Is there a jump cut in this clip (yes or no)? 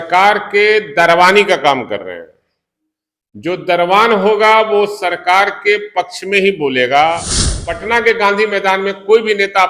yes